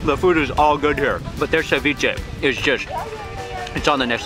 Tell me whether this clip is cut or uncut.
cut